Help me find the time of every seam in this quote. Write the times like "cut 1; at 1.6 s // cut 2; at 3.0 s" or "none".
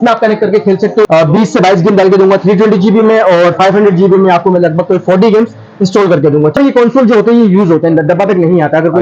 cut 1; at 1.1 s // cut 2; at 6.6 s